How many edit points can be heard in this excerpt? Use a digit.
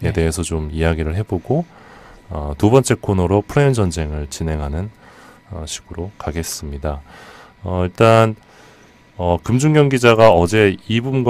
0